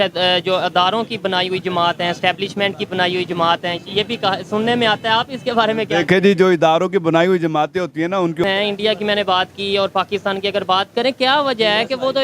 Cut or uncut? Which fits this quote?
cut